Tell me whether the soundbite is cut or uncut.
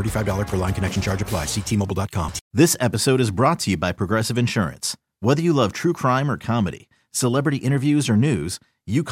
cut